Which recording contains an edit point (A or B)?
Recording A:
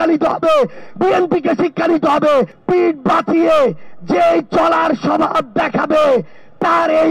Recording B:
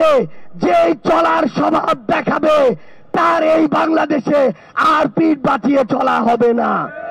A